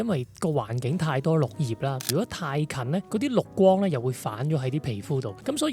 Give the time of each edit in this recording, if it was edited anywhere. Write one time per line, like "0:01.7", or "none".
0:02.1